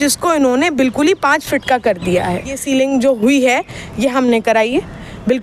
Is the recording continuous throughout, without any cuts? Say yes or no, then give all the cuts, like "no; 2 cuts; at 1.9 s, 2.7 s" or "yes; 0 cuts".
no; 1 cut; at 2.6 s